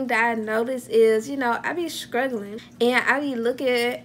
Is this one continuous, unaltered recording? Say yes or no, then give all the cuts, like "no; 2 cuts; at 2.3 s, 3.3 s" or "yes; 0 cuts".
no; 1 cut; at 2.6 s